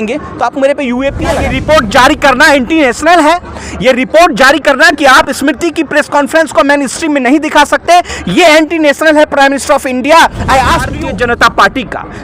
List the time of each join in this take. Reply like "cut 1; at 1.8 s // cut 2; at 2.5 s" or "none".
cut 1; at 1.5 s // cut 2; at 10.9 s

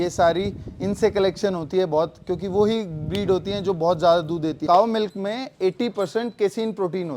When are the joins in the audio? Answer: cut 1; at 4.6 s

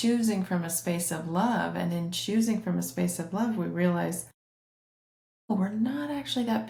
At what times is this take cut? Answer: none

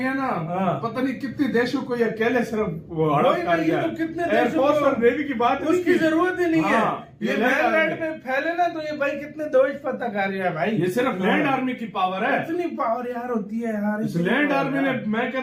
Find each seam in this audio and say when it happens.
none

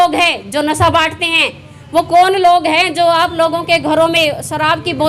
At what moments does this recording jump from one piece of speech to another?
none

